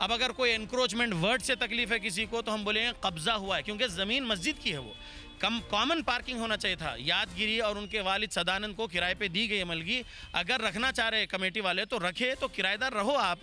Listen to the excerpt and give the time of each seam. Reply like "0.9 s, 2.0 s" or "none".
none

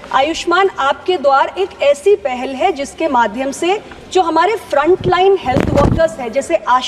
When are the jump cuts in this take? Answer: none

